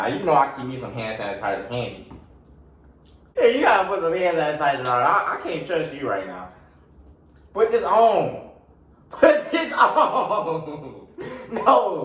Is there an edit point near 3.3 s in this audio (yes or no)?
yes